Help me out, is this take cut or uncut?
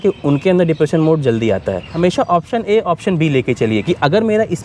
cut